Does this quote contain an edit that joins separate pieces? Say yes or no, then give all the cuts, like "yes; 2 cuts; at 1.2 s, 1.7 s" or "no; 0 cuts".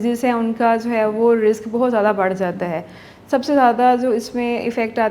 no; 0 cuts